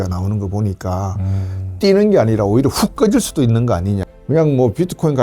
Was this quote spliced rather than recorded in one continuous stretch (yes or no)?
yes